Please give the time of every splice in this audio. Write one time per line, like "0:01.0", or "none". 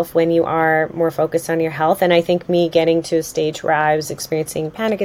none

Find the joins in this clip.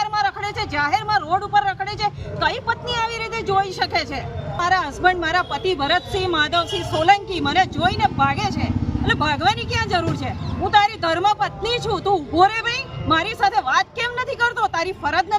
0:04.6

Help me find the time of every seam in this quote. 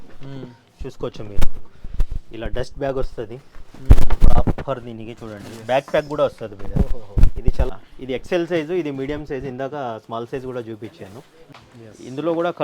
0:07.7
0:11.5

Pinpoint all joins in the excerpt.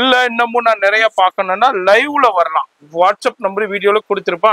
none

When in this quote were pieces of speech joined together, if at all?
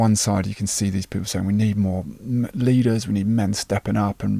none

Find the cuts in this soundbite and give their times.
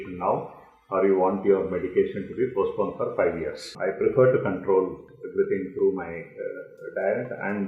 0:03.7

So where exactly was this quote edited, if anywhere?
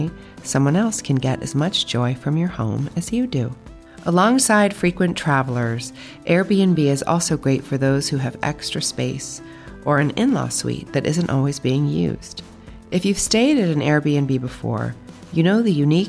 none

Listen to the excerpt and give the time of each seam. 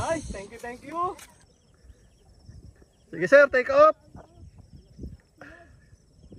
0:01.5

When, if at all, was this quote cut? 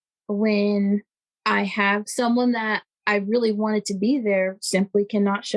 0:02.1

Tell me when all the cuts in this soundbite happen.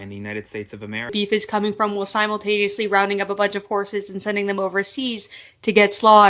0:01.1

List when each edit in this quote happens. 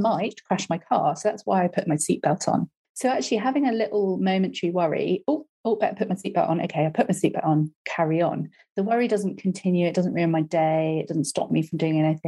0:02.8

